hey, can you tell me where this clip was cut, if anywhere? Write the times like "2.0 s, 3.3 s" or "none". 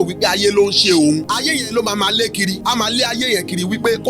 1.2 s, 2.6 s